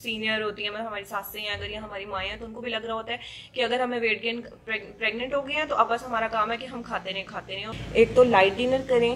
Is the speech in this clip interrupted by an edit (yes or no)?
yes